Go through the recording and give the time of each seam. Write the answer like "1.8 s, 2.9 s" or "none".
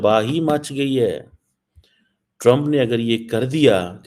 none